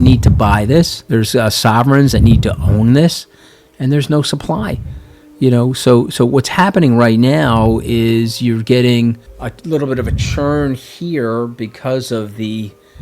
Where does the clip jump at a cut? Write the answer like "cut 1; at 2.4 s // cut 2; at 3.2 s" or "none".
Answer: cut 1; at 1.0 s